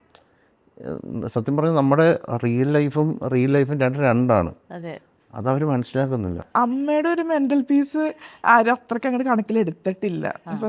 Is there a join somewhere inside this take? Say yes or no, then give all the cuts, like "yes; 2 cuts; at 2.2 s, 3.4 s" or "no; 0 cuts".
yes; 1 cut; at 6.4 s